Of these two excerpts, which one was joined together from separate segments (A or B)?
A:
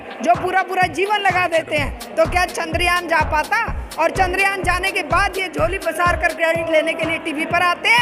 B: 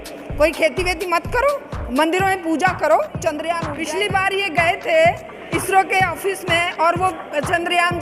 B